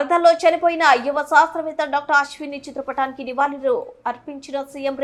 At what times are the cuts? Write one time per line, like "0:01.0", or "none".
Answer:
none